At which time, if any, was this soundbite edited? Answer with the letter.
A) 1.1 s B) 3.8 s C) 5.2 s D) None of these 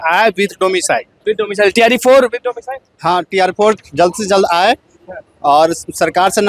D